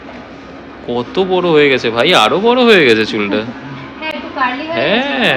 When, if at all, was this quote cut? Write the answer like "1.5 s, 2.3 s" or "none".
none

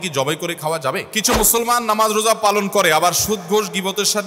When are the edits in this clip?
1.2 s

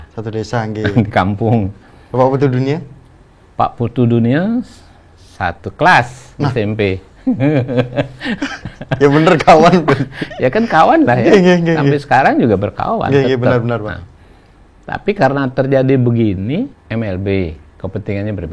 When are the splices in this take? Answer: 16.8 s

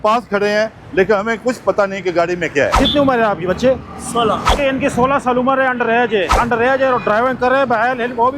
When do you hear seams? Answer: 2.8 s, 4.6 s, 6.3 s

